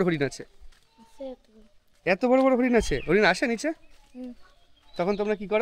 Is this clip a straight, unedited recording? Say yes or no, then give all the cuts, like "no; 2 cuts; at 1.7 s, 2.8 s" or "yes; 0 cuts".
yes; 0 cuts